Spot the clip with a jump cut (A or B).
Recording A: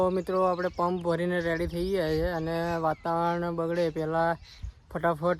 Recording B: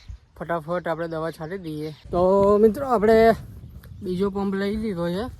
B